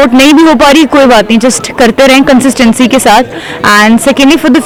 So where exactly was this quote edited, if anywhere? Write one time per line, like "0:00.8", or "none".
none